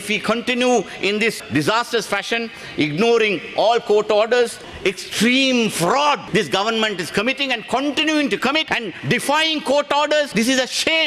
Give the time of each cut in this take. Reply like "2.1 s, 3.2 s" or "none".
4.6 s, 6.2 s, 8.7 s, 10.3 s